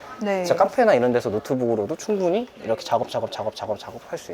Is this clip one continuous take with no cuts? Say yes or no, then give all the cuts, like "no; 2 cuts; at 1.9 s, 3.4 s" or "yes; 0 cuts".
yes; 0 cuts